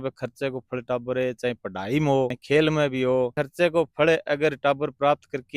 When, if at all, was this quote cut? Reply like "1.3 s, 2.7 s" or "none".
2.4 s, 3.4 s